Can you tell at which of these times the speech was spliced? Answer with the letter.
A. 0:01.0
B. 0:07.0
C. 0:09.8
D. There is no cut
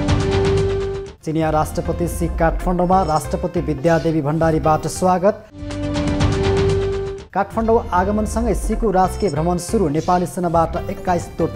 A